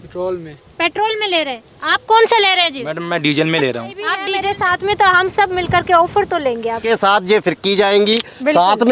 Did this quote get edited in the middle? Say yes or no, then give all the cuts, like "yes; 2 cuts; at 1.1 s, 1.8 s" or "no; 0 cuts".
yes; 2 cuts; at 4.2 s, 6.8 s